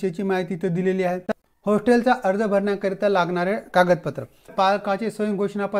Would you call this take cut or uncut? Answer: cut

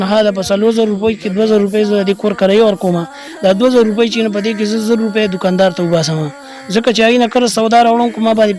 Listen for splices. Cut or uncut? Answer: uncut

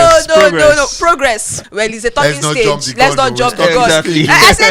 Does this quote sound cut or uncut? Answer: cut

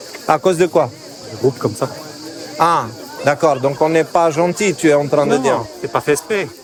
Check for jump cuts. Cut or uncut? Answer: uncut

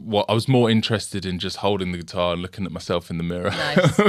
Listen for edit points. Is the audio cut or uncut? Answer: uncut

